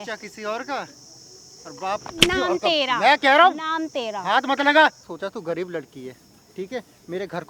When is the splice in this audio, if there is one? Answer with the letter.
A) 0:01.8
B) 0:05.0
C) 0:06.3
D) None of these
B